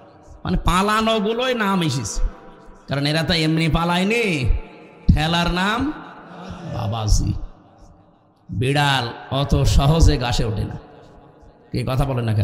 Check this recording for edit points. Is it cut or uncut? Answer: uncut